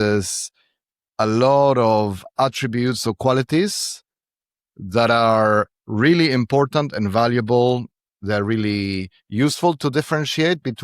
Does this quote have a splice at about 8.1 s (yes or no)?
yes